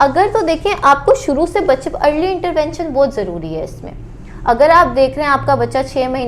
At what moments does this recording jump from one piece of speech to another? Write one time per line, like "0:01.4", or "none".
none